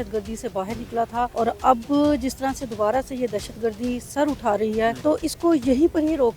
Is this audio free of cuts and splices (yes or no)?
no